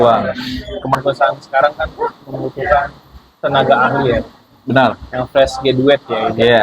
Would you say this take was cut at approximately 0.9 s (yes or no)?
yes